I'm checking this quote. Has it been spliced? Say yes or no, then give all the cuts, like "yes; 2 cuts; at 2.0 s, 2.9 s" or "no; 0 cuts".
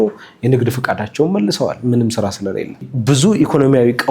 yes; 1 cut; at 2.9 s